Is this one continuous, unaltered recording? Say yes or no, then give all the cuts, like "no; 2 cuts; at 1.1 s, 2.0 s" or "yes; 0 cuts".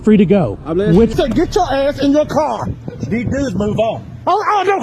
no; 1 cut; at 1.1 s